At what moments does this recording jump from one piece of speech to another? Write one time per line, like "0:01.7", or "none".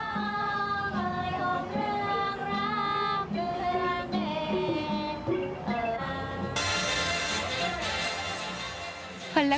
0:08.1